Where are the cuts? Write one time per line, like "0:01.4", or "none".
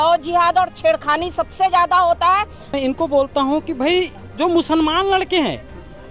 0:02.7